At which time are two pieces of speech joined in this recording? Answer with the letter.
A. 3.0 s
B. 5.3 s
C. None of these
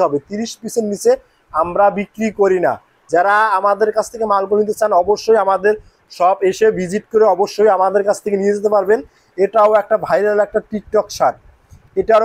A